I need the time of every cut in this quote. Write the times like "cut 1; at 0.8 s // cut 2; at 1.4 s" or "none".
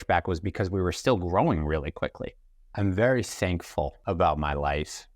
cut 1; at 2.2 s // cut 2; at 4.0 s